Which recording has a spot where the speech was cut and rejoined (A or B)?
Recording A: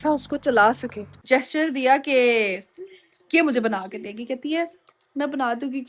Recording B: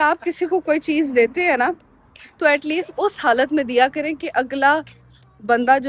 A